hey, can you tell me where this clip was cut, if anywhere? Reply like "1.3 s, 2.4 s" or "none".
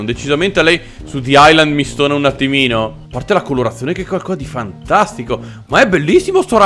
3.2 s